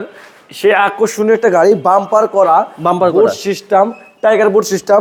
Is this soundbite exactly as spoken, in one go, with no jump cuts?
yes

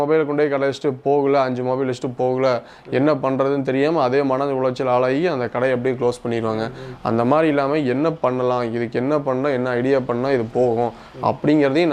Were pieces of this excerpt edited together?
no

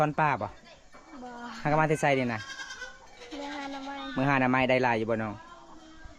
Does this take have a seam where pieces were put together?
no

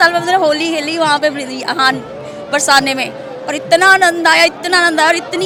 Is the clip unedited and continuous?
yes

